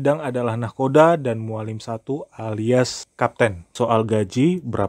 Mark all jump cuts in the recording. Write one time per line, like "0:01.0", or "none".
0:03.6